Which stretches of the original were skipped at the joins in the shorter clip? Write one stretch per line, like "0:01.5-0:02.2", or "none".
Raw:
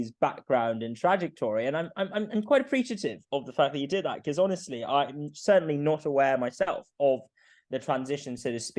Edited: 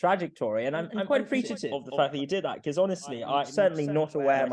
0:02.4-0:03.0
0:05.1-0:05.4